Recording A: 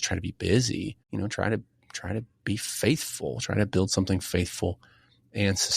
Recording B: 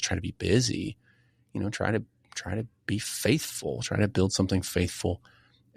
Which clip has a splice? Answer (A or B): A